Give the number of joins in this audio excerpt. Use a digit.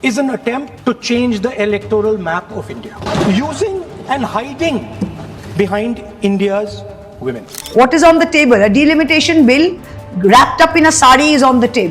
1